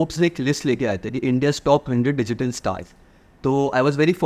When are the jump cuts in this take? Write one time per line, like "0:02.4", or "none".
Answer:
none